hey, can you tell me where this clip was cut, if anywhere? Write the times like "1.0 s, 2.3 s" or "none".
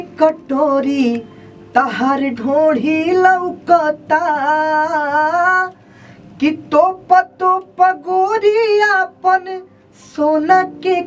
none